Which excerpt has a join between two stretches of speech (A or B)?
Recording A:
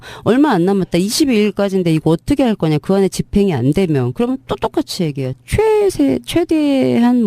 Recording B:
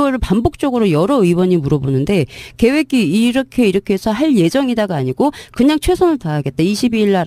A